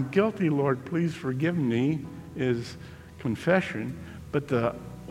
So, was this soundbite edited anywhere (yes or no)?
no